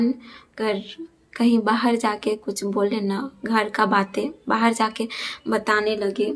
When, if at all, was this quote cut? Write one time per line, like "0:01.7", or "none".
none